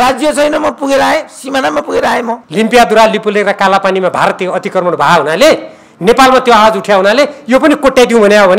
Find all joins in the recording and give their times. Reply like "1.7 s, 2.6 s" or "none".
2.4 s